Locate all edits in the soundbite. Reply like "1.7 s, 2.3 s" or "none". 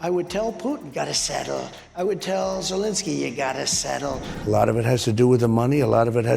4.3 s